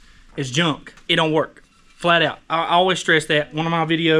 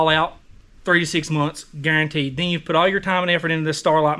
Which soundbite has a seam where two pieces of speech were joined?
first; 1 cut; at 0.9 s

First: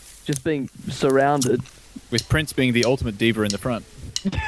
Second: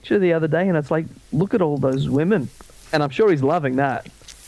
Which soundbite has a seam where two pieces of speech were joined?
second; 1 cut; at 2.8 s

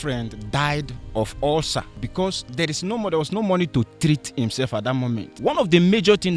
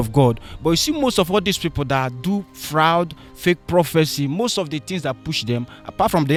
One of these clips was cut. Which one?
first; 3 cuts; at 1.0 s, 2.0 s, 5.3 s

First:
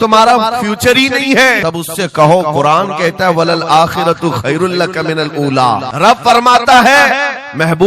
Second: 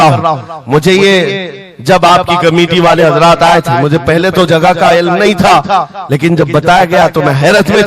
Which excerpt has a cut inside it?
first; 2 cuts; at 1.6 s, 5.9 s

